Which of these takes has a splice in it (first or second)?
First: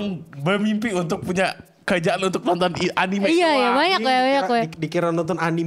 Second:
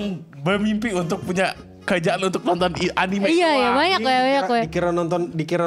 first